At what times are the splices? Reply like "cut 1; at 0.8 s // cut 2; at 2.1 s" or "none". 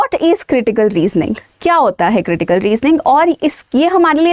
none